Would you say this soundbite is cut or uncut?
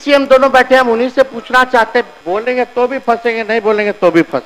cut